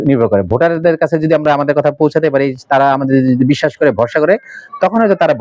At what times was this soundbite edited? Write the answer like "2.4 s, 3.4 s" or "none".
none